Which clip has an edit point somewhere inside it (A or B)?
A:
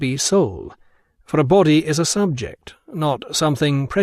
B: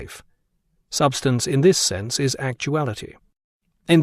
A